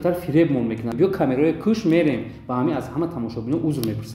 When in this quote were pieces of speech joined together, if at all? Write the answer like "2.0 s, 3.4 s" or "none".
0.9 s